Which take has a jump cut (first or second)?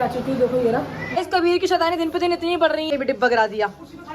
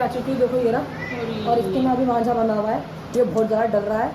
first